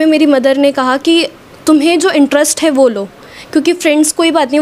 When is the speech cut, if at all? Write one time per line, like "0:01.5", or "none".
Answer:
none